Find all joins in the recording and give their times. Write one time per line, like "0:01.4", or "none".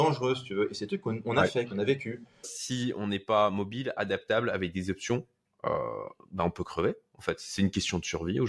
0:02.6